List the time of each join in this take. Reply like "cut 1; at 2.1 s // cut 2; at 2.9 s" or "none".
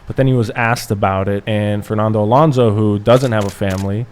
cut 1; at 1.4 s

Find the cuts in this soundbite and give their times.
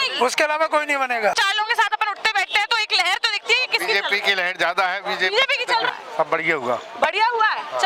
cut 1; at 1.3 s // cut 2; at 5.9 s

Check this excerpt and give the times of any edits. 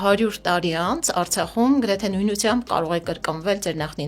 none

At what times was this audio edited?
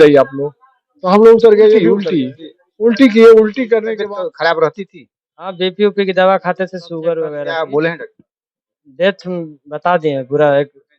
cut 1; at 2.0 s // cut 2; at 3.9 s // cut 3; at 7.4 s

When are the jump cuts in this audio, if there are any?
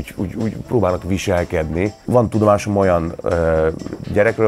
cut 1; at 2.0 s

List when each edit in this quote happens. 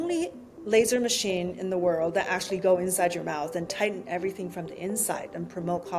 none

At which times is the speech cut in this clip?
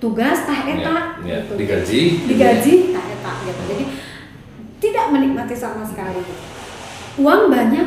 none

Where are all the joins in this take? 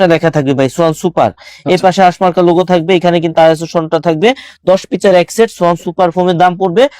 none

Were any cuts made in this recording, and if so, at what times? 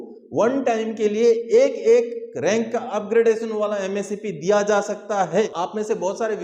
cut 1; at 5.5 s

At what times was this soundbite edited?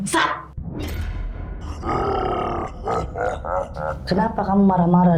cut 1; at 1.7 s // cut 2; at 4.0 s

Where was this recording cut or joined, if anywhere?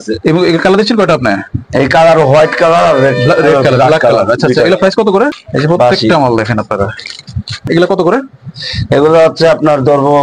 cut 1; at 5.4 s // cut 2; at 7.7 s

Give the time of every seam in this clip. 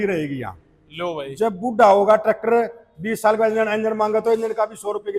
none

